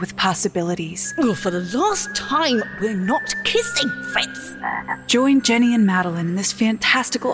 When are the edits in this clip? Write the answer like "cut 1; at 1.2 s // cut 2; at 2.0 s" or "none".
cut 1; at 1.1 s // cut 2; at 5.0 s